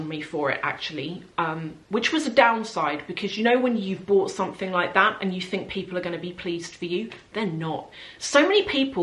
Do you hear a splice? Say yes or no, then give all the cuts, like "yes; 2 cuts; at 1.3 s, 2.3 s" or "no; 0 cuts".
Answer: no; 0 cuts